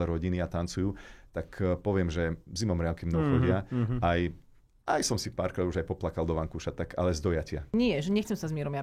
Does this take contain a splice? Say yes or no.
yes